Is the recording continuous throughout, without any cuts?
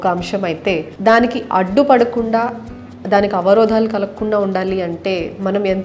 no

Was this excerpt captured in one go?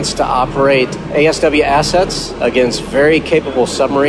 no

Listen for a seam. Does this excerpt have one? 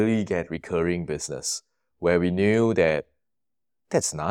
no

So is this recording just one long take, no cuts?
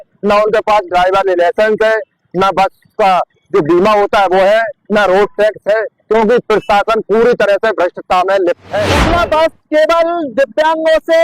no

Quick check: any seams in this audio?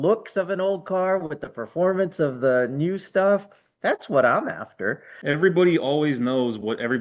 yes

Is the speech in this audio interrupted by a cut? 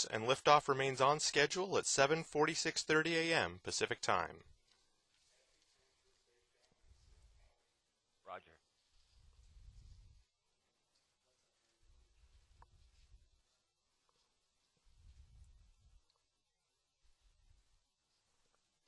yes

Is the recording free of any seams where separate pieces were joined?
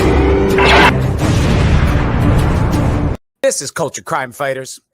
no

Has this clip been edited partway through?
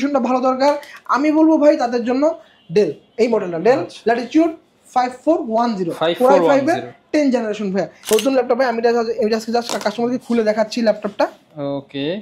yes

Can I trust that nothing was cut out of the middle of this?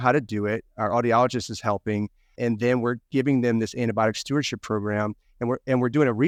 yes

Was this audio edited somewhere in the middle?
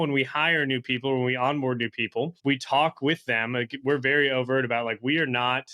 yes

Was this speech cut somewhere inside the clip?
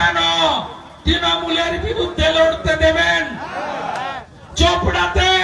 no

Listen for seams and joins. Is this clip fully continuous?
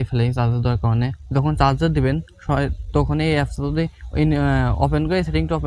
no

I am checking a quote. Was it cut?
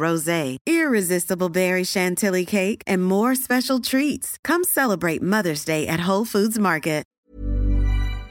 yes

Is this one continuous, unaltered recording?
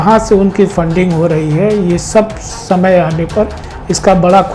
yes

